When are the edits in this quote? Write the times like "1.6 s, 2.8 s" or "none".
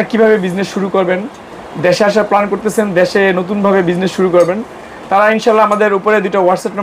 none